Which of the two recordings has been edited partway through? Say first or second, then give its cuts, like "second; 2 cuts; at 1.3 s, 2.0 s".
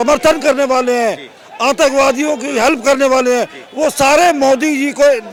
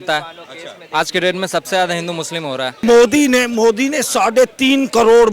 second; 1 cut; at 2.8 s